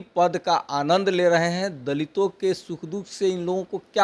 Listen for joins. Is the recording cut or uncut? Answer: uncut